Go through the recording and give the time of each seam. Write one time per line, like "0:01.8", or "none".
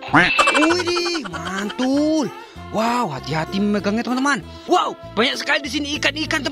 0:04.6